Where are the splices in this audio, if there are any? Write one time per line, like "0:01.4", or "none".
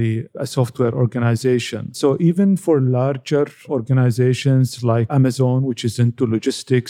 none